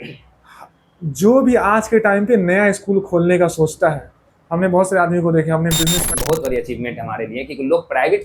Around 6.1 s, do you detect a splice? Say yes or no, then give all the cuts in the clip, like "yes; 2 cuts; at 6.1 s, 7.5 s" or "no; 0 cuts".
yes; 1 cut; at 6.1 s